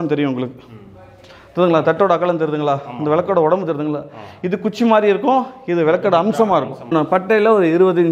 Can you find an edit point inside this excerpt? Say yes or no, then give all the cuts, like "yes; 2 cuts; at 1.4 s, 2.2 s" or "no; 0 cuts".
yes; 1 cut; at 6.8 s